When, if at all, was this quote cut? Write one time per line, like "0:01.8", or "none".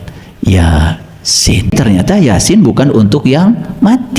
0:01.7